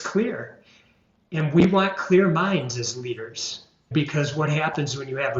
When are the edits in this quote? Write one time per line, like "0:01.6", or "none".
0:03.9